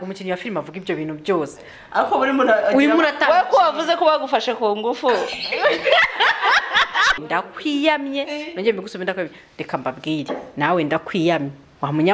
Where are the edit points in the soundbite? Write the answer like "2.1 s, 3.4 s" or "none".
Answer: 7.2 s